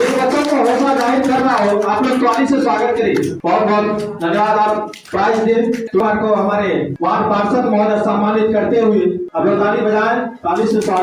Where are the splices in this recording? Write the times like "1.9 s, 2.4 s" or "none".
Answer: 6.0 s